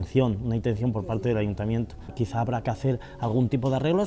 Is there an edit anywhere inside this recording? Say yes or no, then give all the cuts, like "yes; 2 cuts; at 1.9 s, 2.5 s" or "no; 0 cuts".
yes; 1 cut; at 2.1 s